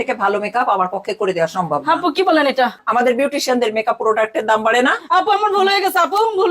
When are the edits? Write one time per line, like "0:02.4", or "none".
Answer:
0:02.8